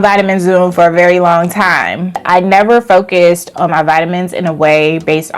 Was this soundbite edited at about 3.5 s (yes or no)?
no